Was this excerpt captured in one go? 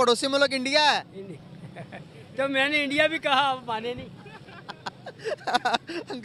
yes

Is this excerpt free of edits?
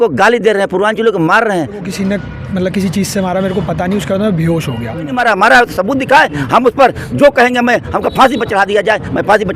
no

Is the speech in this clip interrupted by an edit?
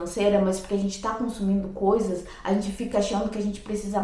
no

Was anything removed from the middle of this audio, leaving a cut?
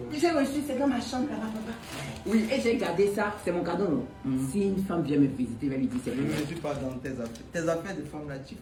no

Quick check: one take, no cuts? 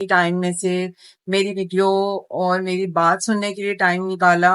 yes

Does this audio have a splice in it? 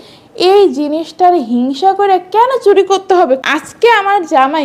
yes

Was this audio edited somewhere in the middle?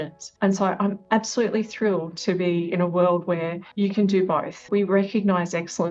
yes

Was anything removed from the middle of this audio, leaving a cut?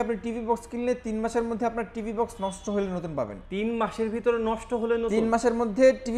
yes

